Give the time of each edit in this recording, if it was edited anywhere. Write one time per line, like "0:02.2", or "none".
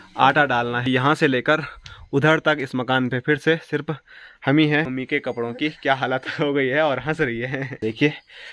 0:00.9
0:04.9
0:07.8